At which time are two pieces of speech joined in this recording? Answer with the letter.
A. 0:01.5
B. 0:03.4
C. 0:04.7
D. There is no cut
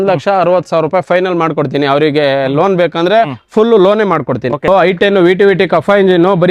C